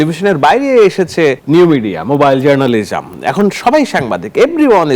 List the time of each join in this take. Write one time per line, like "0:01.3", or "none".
0:01.4